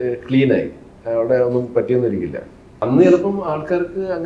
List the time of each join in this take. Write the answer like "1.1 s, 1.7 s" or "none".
2.7 s